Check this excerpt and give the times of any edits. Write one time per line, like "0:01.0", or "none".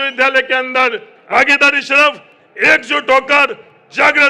0:01.1